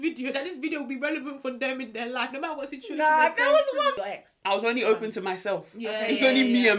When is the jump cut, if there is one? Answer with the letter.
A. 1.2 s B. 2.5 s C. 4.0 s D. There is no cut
C